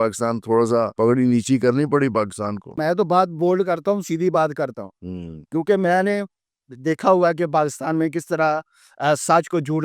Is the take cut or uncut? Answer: cut